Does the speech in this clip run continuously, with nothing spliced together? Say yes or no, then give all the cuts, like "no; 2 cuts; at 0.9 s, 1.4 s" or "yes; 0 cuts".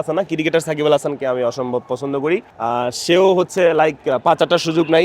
no; 1 cut; at 2.5 s